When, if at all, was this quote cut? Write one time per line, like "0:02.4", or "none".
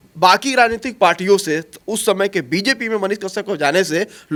none